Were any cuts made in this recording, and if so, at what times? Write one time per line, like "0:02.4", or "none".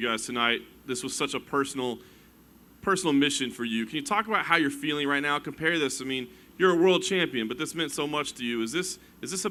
none